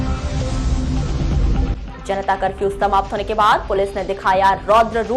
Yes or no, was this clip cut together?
yes